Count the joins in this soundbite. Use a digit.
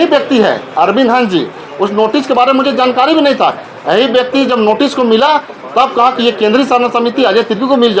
0